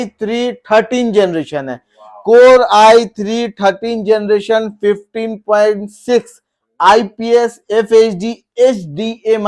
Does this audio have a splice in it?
no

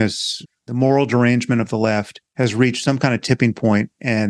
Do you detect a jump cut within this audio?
yes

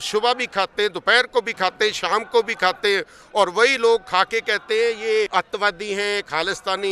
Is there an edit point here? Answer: yes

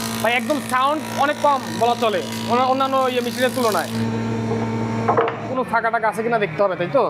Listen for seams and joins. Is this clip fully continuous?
no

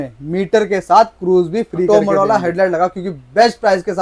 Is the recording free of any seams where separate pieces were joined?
no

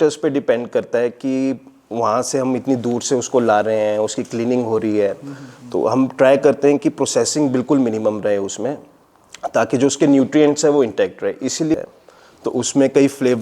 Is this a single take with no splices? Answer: no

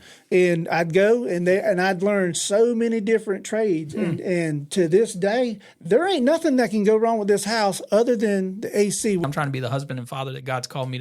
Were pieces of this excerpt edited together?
yes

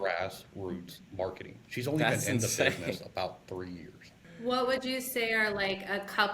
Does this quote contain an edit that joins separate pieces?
yes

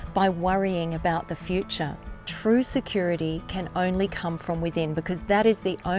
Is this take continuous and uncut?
no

